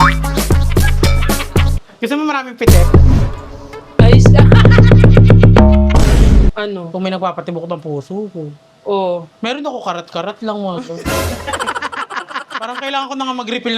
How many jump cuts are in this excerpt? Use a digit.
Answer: 2